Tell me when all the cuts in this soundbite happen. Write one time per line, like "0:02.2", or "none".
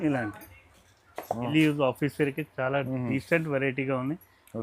0:01.5